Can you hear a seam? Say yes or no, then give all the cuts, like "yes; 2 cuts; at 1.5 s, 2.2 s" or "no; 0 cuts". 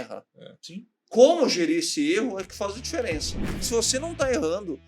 yes; 1 cut; at 3.7 s